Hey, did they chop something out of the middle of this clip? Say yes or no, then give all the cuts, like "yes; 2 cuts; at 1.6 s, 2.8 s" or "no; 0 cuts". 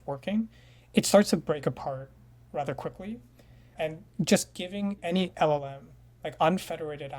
yes; 1 cut; at 5.0 s